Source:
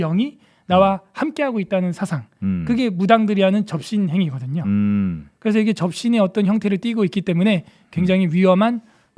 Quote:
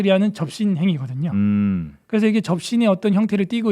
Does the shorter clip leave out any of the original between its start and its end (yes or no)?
no